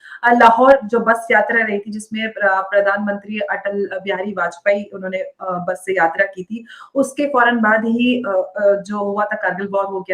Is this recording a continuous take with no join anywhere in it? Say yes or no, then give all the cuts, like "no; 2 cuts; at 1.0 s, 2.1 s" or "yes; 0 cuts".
yes; 0 cuts